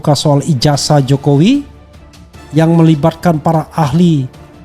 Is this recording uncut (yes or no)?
yes